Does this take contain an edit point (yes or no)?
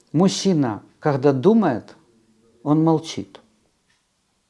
no